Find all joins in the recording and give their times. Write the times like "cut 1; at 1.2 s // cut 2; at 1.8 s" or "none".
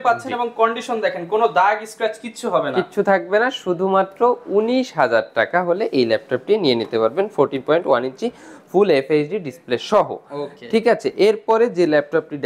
none